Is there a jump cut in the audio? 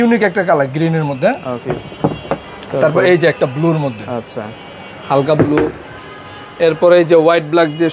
no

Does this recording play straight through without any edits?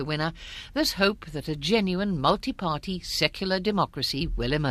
no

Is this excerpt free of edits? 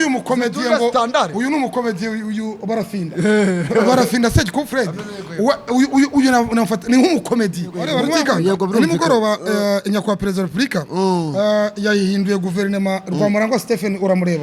no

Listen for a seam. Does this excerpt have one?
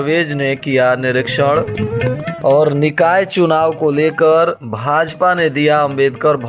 no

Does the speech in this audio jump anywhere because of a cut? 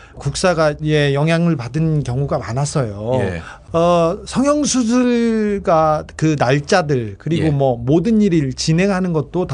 no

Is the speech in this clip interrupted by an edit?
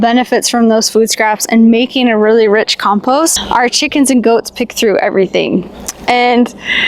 yes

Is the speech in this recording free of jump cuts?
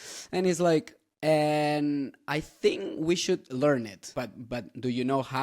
no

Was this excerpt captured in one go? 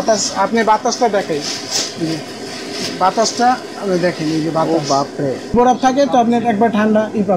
no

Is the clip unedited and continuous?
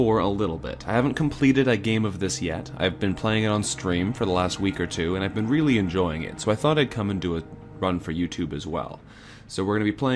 no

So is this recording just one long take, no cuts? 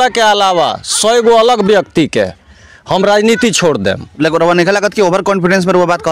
yes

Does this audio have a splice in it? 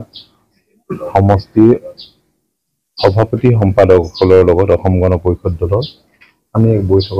no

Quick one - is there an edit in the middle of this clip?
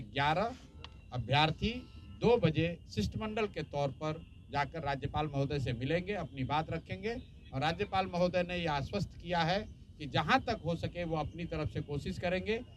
no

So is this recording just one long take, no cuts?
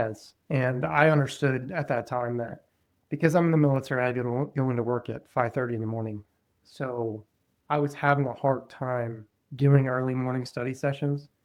yes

